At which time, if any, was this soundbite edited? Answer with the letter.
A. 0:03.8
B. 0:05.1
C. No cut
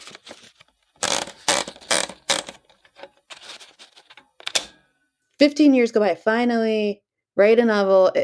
B